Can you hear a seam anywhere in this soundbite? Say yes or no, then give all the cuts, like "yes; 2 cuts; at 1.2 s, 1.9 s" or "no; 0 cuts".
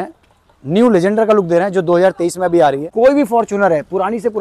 yes; 1 cut; at 2.9 s